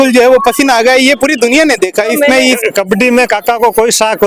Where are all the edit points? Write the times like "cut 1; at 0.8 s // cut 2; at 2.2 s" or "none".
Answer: cut 1; at 2.6 s

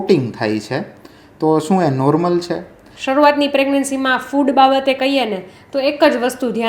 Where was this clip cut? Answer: cut 1; at 2.9 s

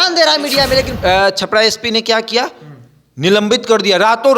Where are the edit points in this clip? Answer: cut 1; at 0.9 s

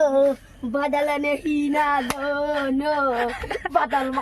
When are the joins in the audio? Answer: none

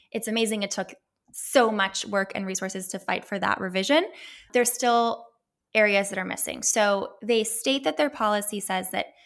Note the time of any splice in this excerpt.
cut 1; at 4.4 s

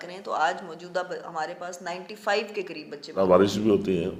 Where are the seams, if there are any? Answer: cut 1; at 3.0 s

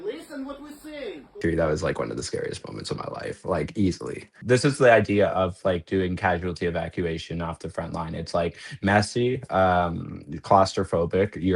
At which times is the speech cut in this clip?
cut 1; at 1.4 s // cut 2; at 4.3 s

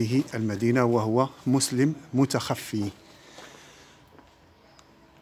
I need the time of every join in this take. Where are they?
none

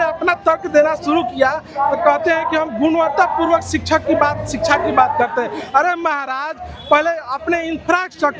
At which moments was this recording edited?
none

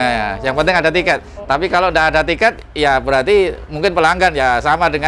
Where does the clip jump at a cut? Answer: none

